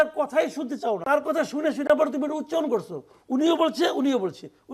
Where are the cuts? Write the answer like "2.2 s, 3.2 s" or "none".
1.0 s